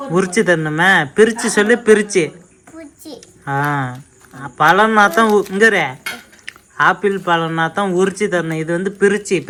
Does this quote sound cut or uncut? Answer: uncut